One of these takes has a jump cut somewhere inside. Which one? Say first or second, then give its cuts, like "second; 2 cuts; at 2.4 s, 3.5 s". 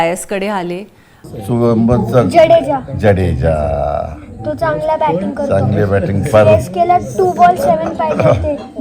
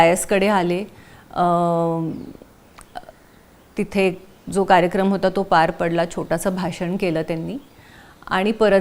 first; 1 cut; at 1.3 s